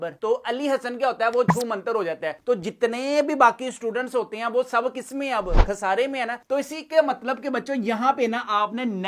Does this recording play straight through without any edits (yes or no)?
yes